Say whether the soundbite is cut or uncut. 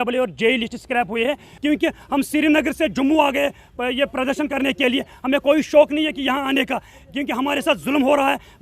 cut